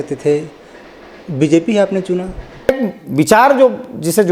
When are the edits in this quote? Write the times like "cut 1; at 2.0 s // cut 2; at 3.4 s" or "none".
cut 1; at 2.7 s